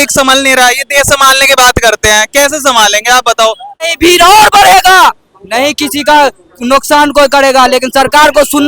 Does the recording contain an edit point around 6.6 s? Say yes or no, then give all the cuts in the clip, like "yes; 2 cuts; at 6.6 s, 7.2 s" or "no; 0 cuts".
no; 1 cut; at 3.9 s